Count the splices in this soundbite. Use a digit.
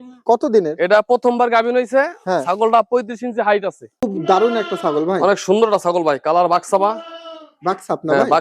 1